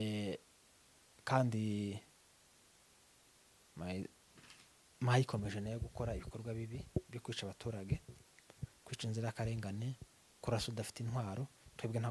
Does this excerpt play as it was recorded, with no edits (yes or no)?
yes